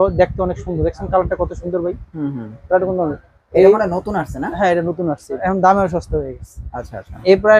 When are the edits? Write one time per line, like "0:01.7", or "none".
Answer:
0:05.4